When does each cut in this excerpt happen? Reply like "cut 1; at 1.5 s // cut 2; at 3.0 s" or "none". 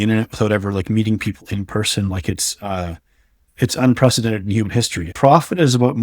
cut 1; at 5.1 s